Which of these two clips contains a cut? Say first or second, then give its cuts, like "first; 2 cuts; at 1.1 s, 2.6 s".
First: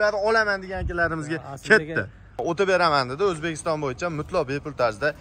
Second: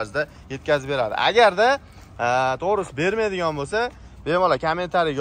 first; 1 cut; at 2.4 s